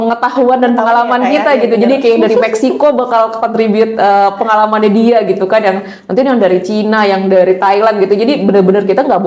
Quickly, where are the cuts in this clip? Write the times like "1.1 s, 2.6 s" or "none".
none